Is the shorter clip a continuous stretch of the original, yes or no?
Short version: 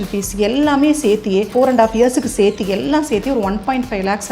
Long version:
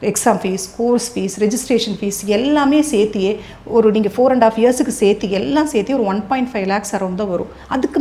no